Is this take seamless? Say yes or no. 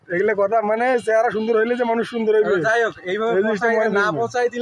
yes